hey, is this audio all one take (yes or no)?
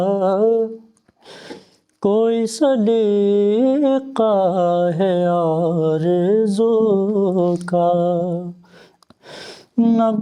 yes